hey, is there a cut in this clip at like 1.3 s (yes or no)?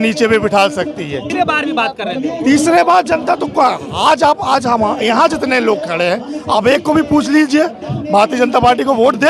yes